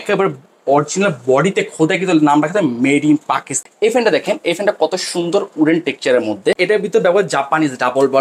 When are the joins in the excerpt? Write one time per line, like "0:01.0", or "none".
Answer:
0:03.6
0:06.6